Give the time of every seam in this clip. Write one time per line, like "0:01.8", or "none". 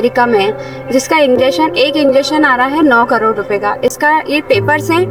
none